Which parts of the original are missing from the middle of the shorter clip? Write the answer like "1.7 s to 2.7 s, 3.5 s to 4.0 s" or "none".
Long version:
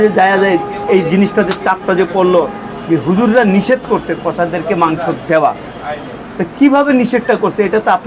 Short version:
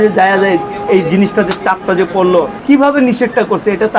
2.6 s to 6.5 s